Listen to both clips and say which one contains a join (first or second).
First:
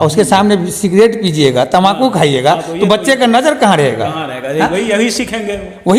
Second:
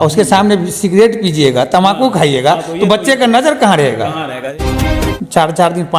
second